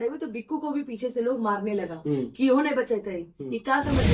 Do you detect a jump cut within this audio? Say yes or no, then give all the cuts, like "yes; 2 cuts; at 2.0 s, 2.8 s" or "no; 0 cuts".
no; 0 cuts